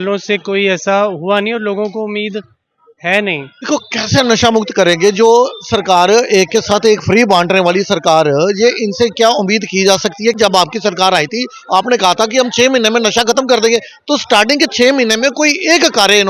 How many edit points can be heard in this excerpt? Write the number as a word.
two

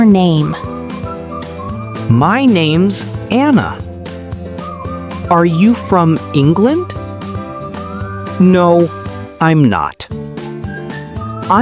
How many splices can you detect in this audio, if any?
two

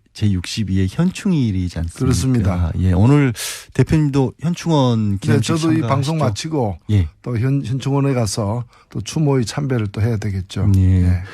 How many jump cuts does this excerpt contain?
one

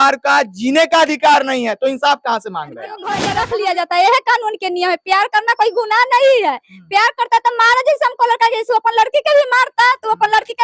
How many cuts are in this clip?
one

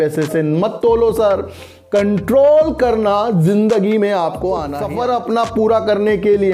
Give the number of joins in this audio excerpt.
one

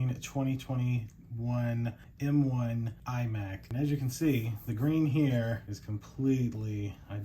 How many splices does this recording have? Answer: two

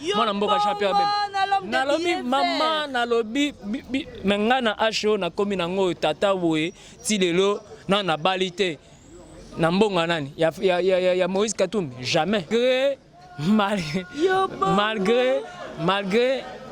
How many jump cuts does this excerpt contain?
one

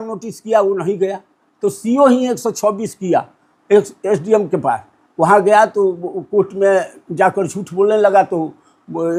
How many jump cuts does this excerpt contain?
zero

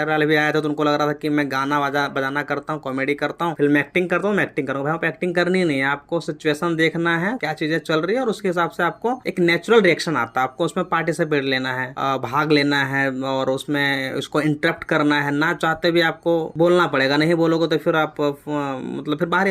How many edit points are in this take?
zero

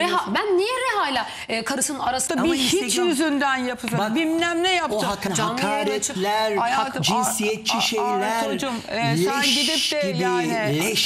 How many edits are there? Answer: two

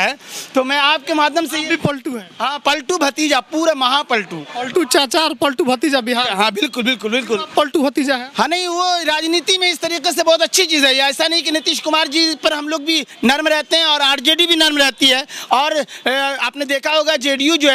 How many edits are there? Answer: zero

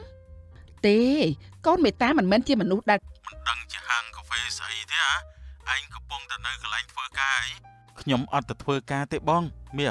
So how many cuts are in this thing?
one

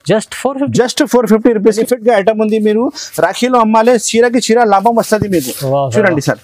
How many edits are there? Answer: one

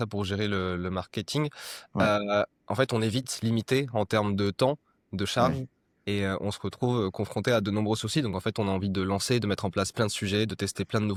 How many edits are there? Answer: zero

